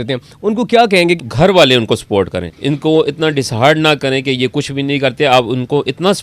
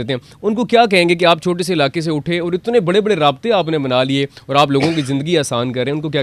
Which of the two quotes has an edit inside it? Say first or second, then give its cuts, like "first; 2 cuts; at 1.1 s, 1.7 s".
first; 2 cuts; at 1.2 s, 2.5 s